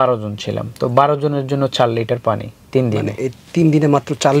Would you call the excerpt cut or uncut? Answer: uncut